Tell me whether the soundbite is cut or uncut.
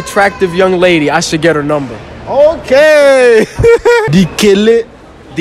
cut